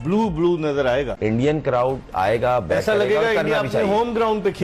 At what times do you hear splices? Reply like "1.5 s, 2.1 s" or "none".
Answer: 1.6 s